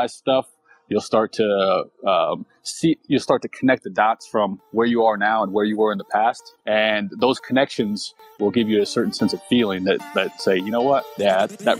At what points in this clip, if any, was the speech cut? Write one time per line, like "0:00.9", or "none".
none